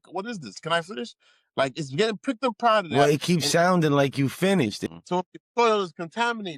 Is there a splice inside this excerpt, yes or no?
yes